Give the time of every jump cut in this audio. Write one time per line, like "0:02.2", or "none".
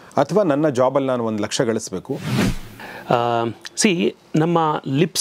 0:02.3